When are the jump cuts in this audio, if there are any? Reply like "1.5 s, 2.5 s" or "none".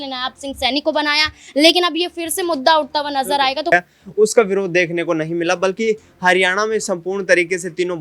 3.7 s